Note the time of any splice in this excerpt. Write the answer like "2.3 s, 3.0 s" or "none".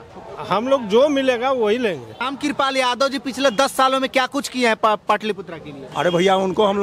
2.3 s